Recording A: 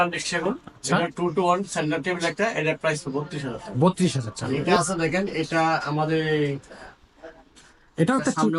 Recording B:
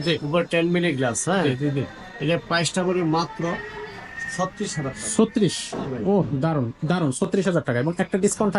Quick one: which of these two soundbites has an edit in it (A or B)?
A